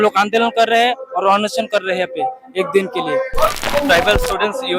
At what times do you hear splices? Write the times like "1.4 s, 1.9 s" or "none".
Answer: 3.6 s